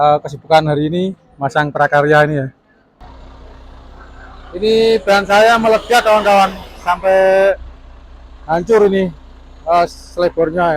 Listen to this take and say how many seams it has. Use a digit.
1